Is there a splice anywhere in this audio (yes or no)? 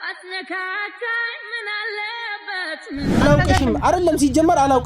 yes